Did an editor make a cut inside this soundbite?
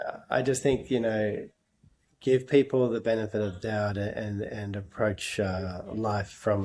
no; 0 cuts

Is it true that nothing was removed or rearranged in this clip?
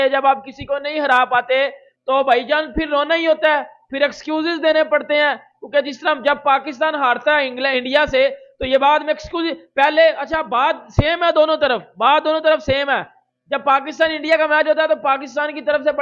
yes; 0 cuts

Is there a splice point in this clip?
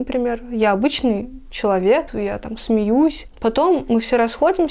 yes; 2 cuts; at 2.1 s, 3.3 s

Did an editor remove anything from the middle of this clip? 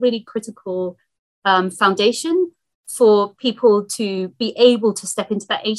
no; 0 cuts

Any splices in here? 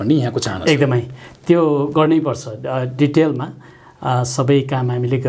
no; 0 cuts

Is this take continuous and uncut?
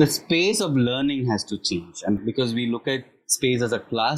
no; 1 cut; at 2.2 s

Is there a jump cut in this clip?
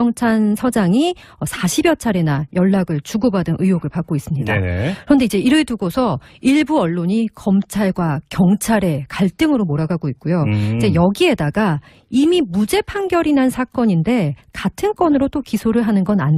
yes; 1 cut; at 13.8 s

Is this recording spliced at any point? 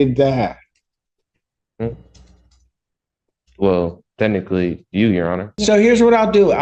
yes; 1 cut; at 5.5 s

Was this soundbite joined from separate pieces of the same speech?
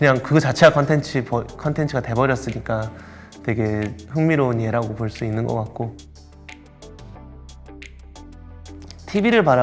no; 0 cuts

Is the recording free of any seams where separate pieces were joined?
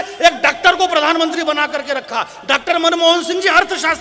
yes; 0 cuts

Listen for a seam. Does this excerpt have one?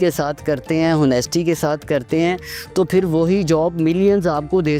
no; 0 cuts

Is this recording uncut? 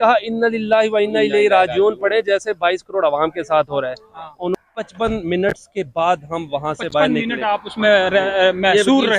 no; 1 cut; at 4.7 s

